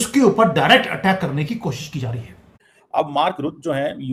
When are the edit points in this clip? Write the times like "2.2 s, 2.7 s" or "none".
none